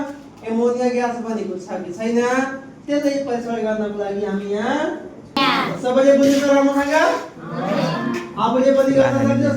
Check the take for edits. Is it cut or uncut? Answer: cut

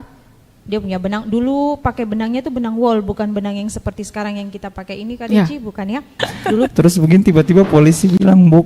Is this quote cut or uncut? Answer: cut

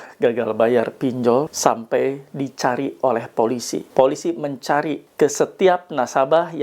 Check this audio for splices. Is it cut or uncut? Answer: cut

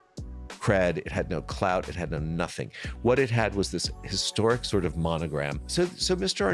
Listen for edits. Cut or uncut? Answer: cut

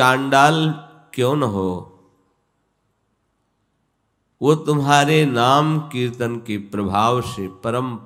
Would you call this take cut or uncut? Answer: uncut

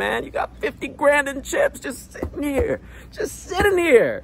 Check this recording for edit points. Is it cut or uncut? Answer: uncut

